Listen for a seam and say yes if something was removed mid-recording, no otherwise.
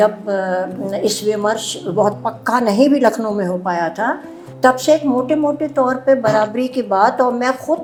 no